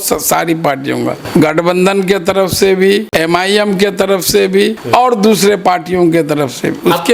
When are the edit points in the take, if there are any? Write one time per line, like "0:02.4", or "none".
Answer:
0:01.2
0:03.1
0:04.8